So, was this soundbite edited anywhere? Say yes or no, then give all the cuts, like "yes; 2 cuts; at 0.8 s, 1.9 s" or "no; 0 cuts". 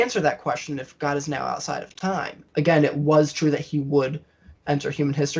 yes; 1 cut; at 2.4 s